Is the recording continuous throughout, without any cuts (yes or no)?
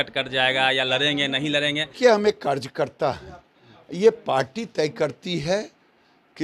no